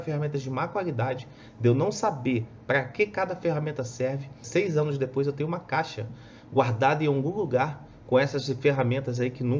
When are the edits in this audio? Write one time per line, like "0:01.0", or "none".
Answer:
0:04.4